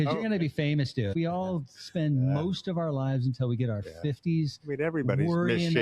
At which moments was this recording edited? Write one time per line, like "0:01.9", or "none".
0:01.1